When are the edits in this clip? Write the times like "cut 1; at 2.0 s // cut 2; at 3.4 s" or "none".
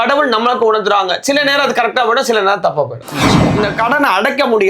cut 1; at 3.5 s